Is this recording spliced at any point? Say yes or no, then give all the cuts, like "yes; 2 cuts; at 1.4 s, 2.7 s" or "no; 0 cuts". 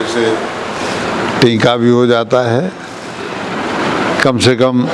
no; 0 cuts